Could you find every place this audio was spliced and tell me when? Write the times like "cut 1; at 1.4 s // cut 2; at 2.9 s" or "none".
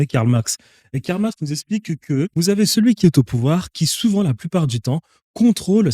cut 1; at 2.3 s